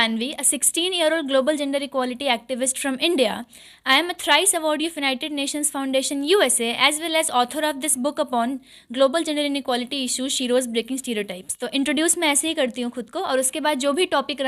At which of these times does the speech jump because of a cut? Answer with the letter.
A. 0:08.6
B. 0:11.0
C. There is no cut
C